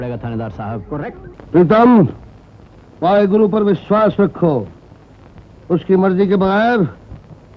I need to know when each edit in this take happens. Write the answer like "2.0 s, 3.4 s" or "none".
1.3 s